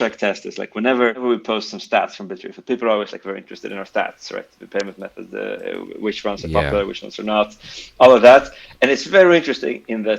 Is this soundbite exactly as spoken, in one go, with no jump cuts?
no; 1 cut; at 1.2 s

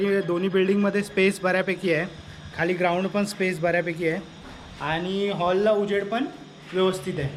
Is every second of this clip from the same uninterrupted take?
yes; 0 cuts

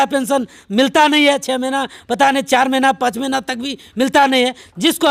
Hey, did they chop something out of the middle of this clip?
no; 0 cuts

